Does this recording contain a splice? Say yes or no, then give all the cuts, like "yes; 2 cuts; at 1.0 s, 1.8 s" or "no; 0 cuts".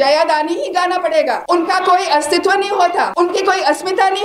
yes; 2 cuts; at 1.4 s, 3.1 s